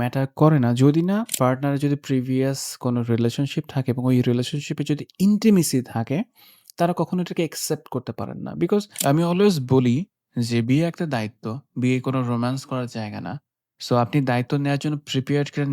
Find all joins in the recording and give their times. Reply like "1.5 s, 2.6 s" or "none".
1.3 s, 8.9 s